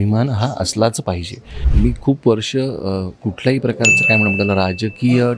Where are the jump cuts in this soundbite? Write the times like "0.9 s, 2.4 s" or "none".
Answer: 1.6 s